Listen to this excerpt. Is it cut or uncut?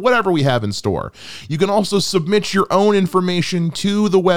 uncut